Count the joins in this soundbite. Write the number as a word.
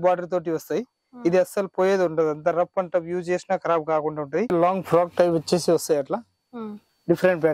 one